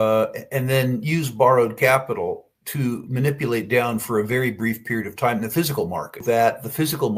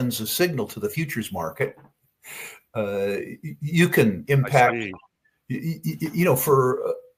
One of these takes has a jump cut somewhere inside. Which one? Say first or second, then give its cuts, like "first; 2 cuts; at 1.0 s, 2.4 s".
first; 1 cut; at 6.2 s